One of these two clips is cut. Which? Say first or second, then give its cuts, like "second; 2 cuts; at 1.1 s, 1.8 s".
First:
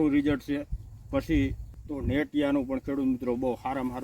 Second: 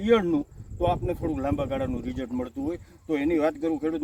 first; 1 cut; at 1.7 s